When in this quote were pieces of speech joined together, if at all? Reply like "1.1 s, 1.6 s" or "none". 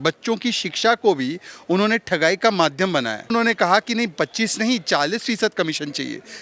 3.3 s

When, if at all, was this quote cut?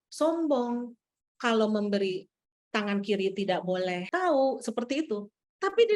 4.0 s

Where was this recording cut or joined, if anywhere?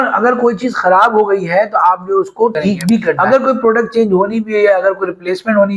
3.2 s

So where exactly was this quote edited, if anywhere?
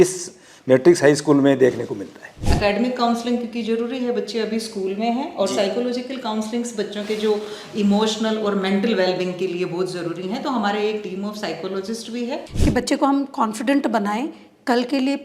2.4 s, 12.4 s

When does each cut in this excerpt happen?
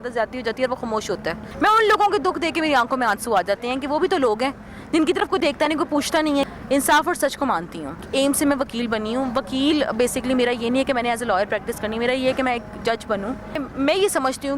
1.5 s, 6.4 s, 8.0 s, 13.6 s

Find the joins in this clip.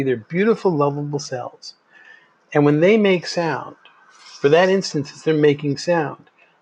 none

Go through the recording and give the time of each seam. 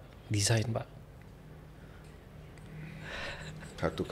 none

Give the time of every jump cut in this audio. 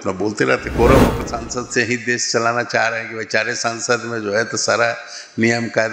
1.2 s

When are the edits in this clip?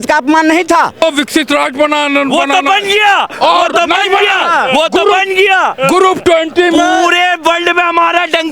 1.0 s

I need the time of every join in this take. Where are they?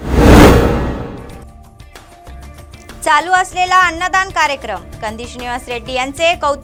none

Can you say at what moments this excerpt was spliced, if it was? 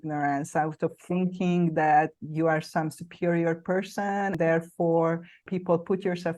2.2 s, 4.4 s, 5.4 s

